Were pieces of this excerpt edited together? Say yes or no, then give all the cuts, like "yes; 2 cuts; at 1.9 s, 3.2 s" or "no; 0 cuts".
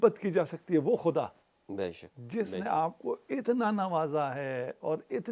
no; 0 cuts